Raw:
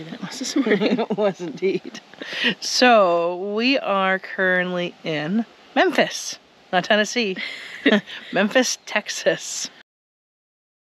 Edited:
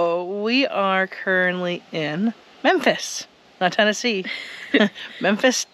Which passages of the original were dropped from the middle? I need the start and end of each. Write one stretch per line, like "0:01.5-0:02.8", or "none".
none